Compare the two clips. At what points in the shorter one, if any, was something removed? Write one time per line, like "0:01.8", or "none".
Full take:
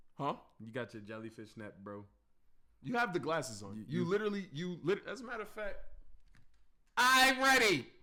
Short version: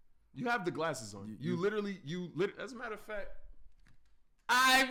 none